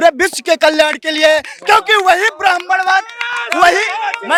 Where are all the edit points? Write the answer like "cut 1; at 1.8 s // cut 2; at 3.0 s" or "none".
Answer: none